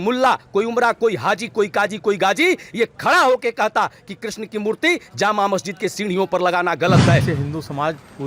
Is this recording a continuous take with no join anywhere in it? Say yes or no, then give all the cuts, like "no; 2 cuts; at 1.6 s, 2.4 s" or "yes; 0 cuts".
no; 1 cut; at 7.2 s